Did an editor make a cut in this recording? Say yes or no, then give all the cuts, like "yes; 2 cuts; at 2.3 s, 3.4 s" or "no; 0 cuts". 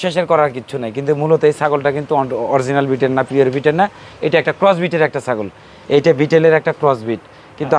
no; 0 cuts